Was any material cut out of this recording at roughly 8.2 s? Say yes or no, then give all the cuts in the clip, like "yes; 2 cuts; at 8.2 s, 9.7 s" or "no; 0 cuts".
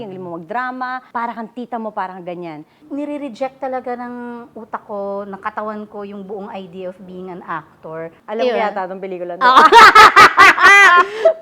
yes; 3 cuts; at 1.0 s, 2.8 s, 8.2 s